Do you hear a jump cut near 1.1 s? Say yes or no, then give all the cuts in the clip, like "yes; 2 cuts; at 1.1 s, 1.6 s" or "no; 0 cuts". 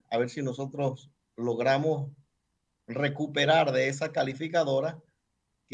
no; 0 cuts